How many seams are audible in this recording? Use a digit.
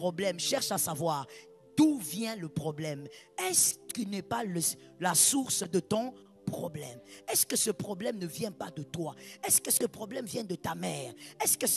0